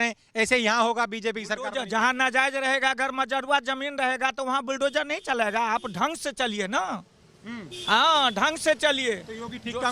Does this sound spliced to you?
no; 0 cuts

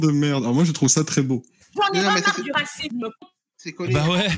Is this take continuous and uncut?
yes; 0 cuts

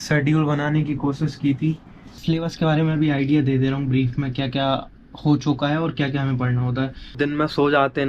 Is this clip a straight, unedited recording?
no; 2 cuts; at 2.2 s, 7.2 s

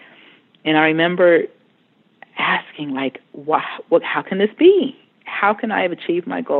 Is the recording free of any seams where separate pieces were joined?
yes; 0 cuts

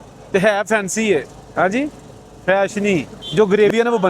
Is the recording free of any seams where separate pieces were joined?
no; 1 cut; at 3.2 s

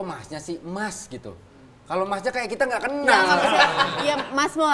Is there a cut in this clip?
no; 0 cuts

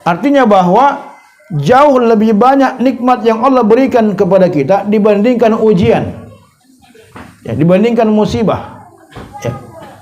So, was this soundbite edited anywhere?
no; 0 cuts

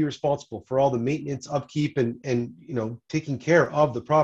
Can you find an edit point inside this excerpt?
no; 0 cuts

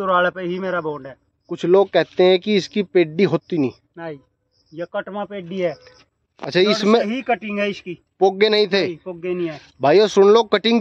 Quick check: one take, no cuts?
yes; 0 cuts

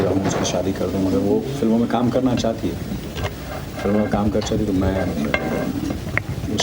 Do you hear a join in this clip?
no; 0 cuts

